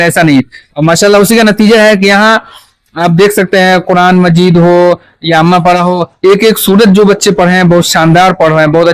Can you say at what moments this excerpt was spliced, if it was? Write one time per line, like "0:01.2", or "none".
none